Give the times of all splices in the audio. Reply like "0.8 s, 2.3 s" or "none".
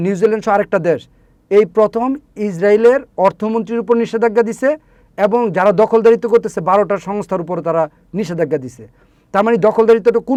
none